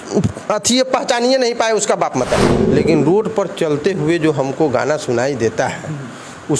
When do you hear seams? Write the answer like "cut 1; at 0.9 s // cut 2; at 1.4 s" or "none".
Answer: cut 1; at 2.5 s